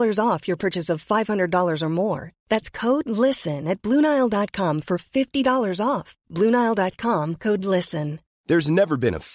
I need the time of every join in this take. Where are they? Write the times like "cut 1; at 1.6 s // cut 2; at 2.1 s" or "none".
none